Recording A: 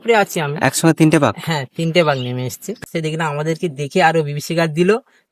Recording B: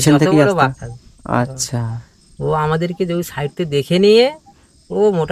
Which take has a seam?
A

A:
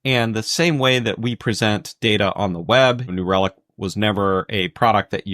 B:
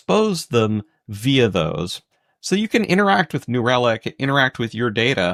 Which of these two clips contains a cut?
A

